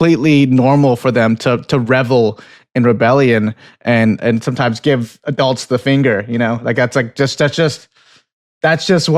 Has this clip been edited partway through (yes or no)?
no